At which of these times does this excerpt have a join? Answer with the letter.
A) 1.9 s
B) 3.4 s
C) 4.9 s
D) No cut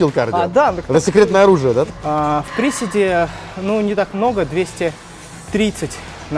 A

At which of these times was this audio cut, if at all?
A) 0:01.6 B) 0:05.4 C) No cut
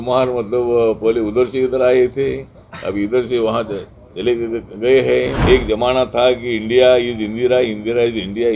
B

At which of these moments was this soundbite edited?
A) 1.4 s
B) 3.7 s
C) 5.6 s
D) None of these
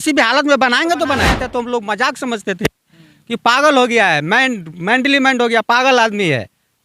A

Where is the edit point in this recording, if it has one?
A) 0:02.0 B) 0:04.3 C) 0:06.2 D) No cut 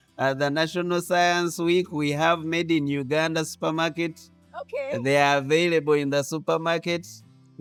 D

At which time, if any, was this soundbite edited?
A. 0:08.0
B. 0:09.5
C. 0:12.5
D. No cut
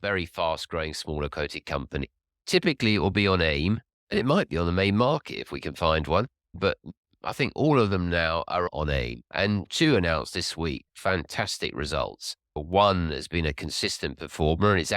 B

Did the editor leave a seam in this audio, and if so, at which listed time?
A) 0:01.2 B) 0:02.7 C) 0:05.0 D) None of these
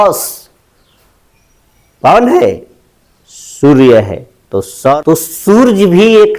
C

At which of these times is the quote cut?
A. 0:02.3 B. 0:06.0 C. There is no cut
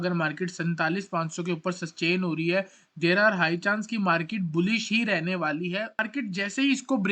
B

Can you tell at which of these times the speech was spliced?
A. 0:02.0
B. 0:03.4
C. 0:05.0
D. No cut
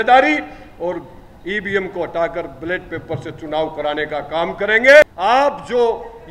C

